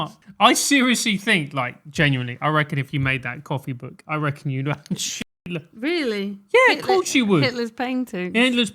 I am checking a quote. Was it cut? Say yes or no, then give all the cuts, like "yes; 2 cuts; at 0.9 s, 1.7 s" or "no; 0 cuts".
no; 0 cuts